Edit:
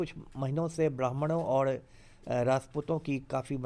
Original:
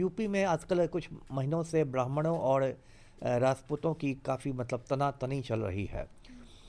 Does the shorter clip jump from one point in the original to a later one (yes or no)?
no